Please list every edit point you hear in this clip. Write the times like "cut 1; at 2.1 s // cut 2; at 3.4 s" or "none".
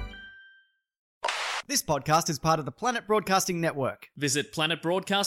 cut 1; at 1.2 s